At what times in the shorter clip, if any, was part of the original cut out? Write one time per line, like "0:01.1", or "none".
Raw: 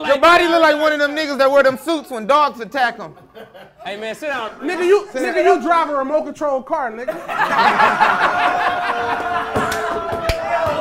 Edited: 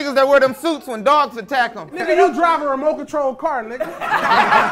0:01.9